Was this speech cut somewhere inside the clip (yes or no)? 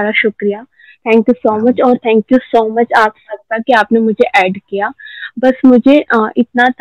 no